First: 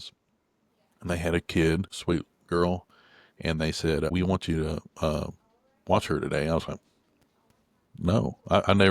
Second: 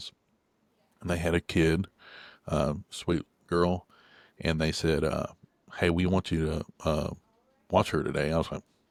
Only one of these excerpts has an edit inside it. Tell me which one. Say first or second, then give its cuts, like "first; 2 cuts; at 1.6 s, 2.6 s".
first; 2 cuts; at 1.9 s, 4.1 s